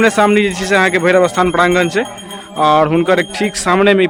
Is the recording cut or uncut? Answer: uncut